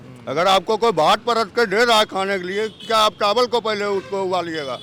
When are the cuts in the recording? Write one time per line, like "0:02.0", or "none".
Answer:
none